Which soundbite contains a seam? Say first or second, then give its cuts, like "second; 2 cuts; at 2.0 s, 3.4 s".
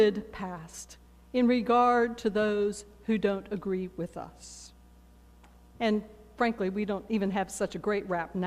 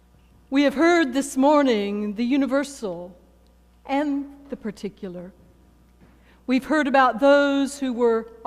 first; 1 cut; at 6.3 s